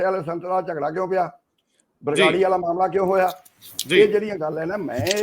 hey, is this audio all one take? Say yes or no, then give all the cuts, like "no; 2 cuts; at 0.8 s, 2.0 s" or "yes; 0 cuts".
yes; 0 cuts